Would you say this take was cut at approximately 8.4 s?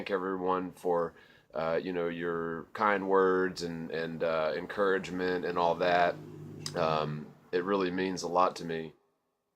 yes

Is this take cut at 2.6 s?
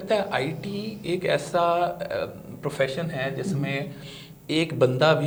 no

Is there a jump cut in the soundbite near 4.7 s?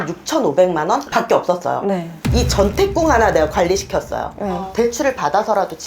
yes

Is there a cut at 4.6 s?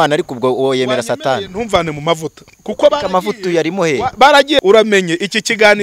yes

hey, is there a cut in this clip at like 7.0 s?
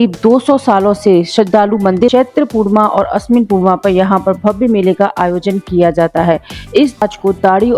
yes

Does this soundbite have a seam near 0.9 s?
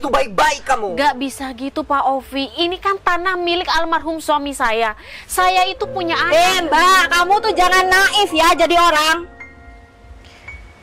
no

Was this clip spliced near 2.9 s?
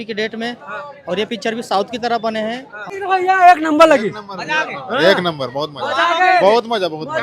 yes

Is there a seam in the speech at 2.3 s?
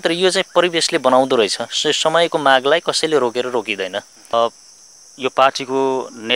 no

